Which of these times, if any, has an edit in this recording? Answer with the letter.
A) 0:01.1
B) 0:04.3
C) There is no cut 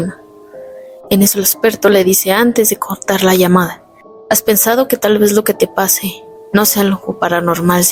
C